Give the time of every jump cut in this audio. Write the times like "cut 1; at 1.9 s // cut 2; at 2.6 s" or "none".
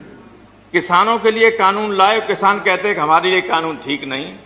cut 1; at 2.3 s